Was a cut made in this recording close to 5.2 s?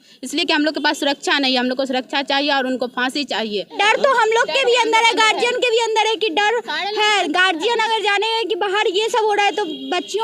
no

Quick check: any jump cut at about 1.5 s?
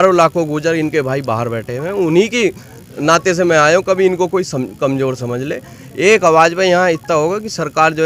no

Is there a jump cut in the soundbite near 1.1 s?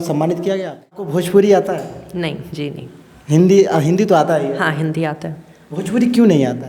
yes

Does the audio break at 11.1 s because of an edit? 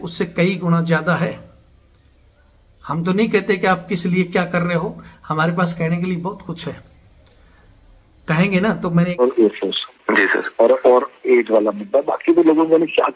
no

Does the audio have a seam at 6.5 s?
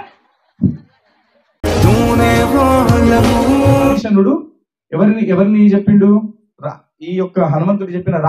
no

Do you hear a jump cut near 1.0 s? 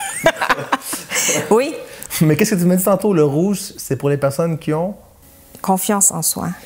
no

